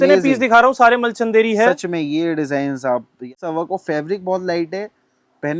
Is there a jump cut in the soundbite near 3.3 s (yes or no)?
yes